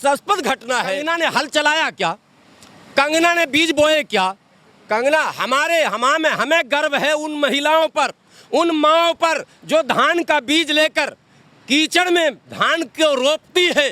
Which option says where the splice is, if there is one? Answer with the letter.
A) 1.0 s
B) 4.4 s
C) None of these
A